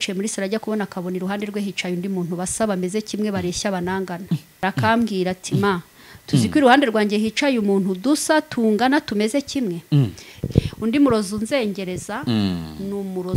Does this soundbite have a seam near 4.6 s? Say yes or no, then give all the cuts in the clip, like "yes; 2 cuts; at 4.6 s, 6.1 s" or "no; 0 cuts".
yes; 2 cuts; at 4.6 s, 10.3 s